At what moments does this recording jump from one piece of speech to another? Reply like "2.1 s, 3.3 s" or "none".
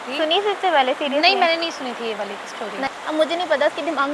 2.9 s